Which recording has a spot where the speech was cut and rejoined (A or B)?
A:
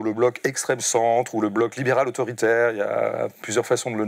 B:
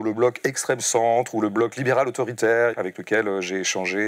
B